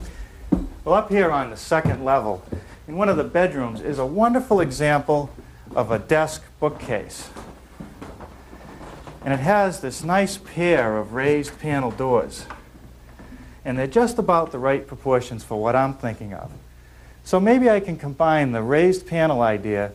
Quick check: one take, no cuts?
no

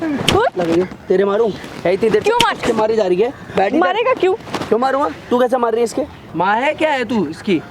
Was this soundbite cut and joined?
yes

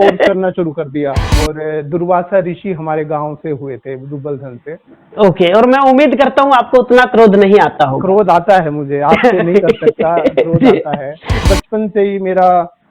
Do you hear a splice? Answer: yes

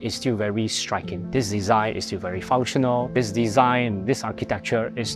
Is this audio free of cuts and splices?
no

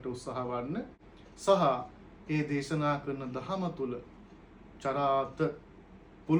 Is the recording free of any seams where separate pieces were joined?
yes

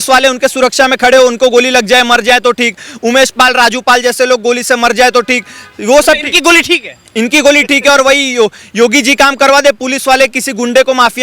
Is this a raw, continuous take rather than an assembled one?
yes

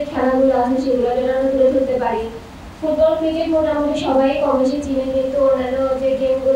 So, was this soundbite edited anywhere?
no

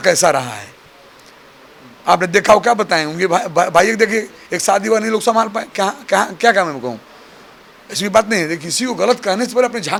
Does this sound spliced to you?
no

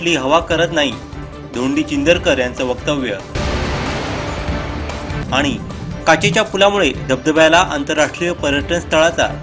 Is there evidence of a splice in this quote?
no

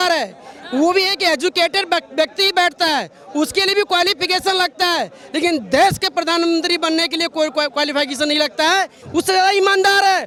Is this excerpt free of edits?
yes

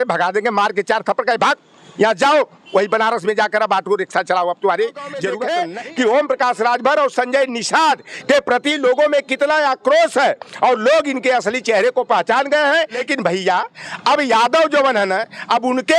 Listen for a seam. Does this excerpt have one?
yes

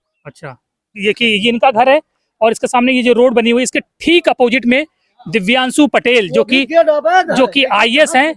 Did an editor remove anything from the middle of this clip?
yes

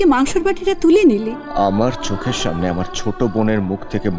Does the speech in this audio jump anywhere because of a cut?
yes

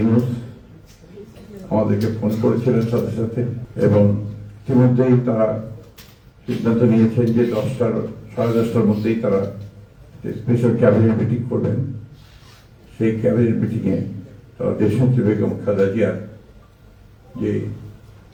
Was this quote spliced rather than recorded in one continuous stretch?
no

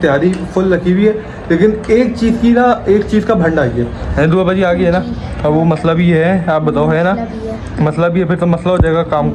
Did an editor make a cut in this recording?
no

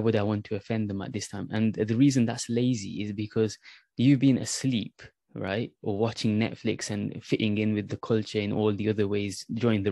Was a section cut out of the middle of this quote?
no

